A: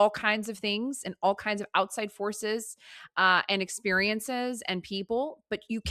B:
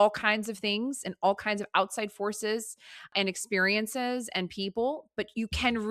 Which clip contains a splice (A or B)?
B